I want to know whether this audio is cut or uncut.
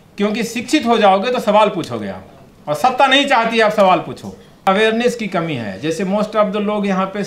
cut